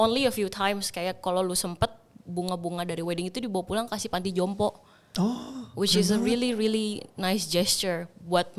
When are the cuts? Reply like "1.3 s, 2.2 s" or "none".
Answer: none